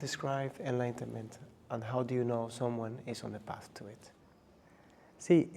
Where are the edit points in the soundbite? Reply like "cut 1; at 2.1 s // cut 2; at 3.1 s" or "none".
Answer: none